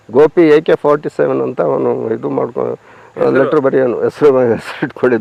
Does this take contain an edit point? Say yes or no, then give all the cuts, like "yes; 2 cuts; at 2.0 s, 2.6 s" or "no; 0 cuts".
no; 0 cuts